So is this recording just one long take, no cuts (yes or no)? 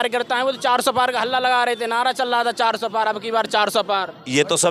yes